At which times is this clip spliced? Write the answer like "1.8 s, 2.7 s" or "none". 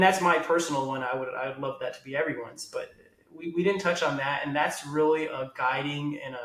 none